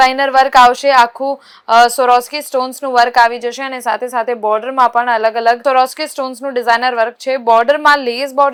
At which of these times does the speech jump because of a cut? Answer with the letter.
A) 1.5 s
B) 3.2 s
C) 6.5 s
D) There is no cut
D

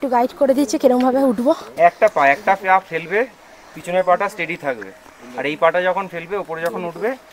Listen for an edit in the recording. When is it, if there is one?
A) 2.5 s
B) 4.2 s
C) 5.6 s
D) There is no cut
D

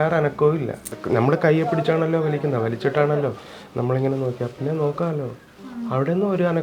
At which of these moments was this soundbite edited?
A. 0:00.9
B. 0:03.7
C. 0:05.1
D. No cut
A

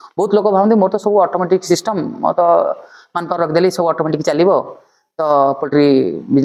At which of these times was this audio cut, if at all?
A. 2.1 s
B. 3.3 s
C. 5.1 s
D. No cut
D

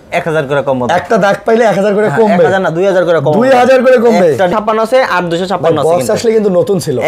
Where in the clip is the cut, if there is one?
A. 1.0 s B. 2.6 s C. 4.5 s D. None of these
C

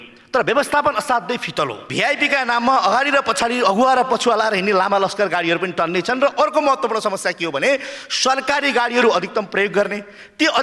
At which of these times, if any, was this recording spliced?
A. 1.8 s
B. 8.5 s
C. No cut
A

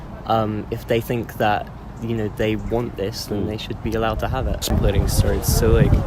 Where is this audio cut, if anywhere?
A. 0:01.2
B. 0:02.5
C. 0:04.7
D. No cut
C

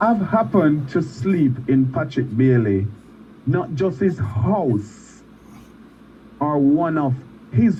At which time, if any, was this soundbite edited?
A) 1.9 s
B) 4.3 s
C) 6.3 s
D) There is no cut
D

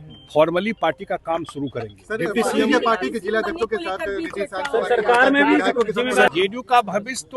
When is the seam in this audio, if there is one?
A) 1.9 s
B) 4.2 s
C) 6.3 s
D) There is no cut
C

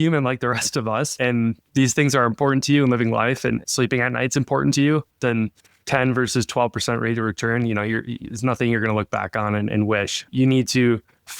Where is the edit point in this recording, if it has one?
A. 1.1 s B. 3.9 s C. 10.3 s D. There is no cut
A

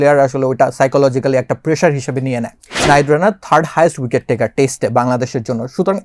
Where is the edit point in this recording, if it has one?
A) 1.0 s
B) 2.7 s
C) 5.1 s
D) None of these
B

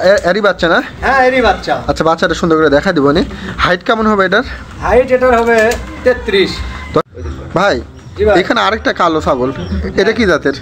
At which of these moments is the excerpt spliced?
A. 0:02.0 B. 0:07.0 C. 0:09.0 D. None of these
B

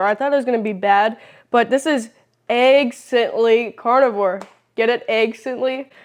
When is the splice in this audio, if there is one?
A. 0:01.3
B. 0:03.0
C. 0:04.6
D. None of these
D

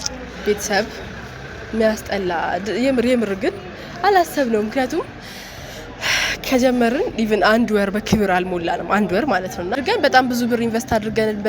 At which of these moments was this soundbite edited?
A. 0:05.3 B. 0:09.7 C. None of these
B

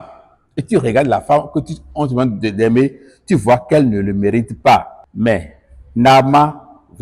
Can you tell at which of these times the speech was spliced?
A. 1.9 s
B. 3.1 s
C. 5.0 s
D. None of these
C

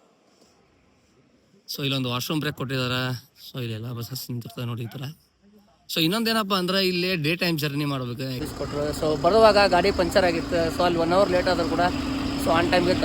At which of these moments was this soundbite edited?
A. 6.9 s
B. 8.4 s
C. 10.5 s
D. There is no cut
B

